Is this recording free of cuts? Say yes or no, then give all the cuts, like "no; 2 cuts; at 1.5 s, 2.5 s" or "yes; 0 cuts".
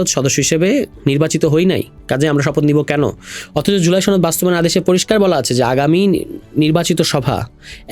yes; 0 cuts